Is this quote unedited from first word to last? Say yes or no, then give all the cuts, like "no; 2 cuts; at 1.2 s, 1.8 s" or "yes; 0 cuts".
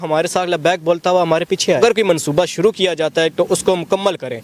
no; 1 cut; at 1.8 s